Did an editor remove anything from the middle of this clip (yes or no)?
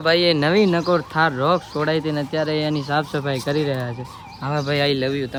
no